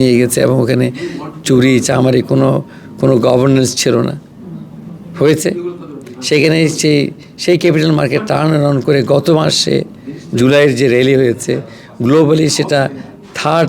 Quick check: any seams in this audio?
no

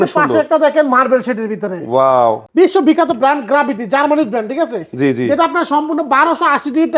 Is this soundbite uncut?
no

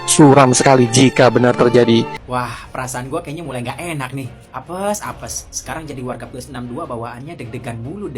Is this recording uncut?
no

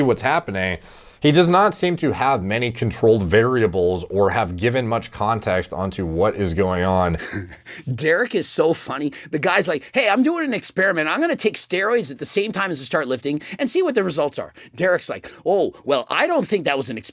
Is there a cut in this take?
no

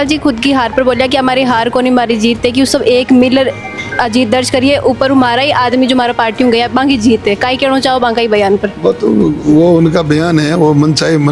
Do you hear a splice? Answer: no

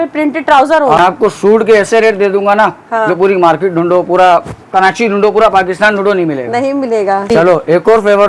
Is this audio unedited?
no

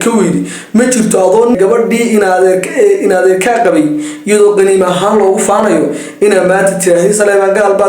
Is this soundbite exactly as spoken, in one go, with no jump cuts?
no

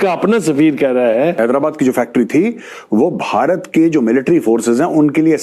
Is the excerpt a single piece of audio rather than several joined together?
no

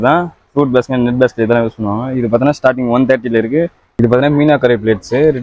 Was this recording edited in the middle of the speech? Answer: yes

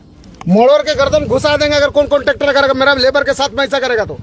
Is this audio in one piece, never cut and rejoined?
yes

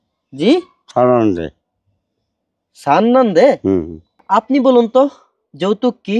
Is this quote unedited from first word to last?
no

